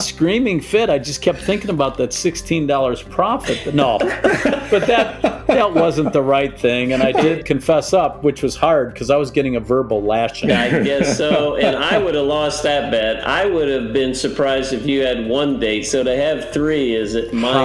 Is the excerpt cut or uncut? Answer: cut